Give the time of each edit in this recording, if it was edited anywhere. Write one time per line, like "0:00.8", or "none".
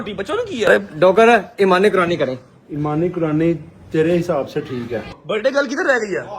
0:00.7
0:05.1